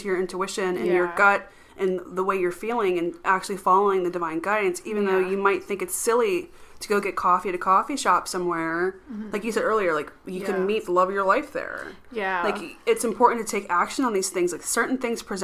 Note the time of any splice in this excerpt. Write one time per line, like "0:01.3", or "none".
none